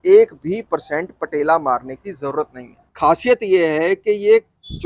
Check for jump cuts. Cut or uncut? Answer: cut